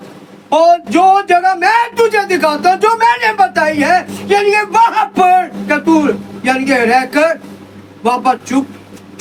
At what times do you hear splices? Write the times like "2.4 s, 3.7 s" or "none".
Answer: none